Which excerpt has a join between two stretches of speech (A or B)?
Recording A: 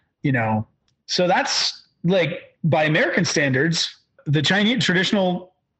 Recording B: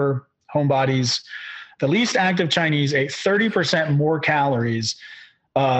A